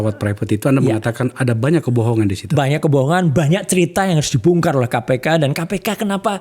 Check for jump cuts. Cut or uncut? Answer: uncut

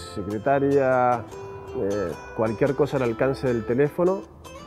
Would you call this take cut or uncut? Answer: uncut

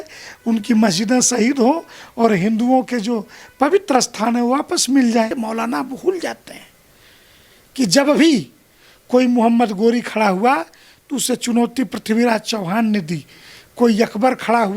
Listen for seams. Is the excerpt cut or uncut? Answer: cut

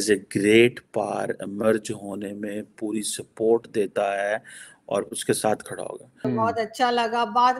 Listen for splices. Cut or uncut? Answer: cut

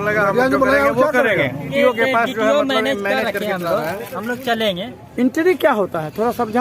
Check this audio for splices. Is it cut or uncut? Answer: cut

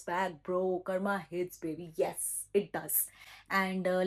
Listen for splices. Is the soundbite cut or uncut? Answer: uncut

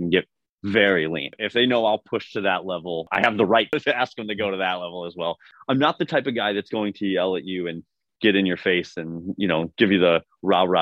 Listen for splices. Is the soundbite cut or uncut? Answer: cut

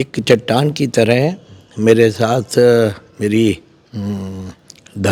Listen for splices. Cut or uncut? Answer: uncut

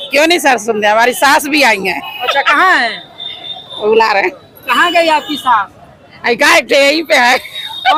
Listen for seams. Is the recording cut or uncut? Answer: uncut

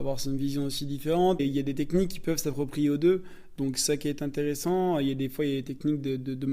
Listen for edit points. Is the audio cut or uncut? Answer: cut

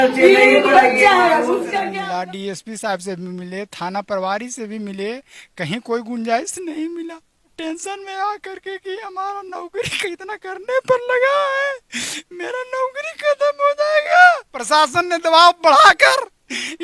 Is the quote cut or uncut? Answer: cut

